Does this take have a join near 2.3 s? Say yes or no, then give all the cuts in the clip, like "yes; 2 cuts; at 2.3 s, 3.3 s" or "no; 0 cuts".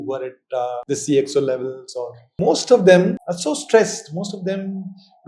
yes; 3 cuts; at 0.8 s, 2.3 s, 3.3 s